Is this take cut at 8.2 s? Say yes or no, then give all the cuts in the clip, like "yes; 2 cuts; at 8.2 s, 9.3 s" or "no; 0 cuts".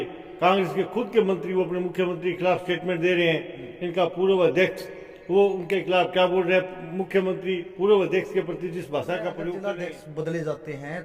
no; 1 cut; at 9.6 s